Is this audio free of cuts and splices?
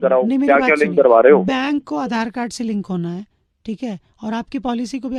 yes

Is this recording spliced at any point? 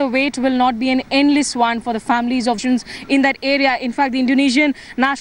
no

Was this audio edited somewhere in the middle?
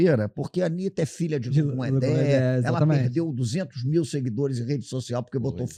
no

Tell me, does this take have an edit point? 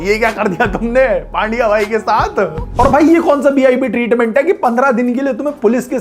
yes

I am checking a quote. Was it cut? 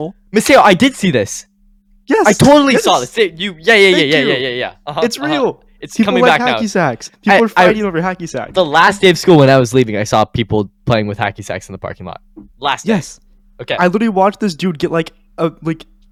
no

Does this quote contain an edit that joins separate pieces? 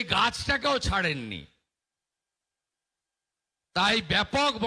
no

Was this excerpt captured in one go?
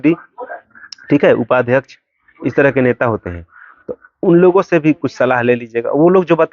yes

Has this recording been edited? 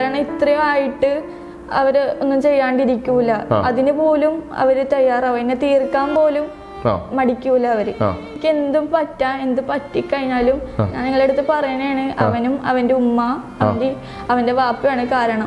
yes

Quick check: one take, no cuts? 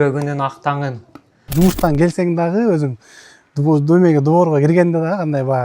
no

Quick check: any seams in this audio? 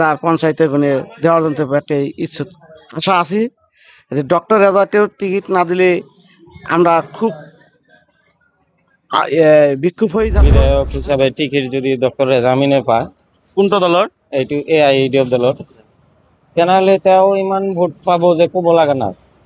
yes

